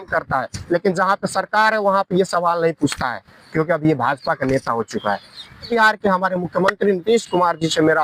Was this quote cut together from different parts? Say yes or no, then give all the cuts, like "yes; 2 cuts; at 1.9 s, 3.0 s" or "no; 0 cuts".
yes; 1 cut; at 5.7 s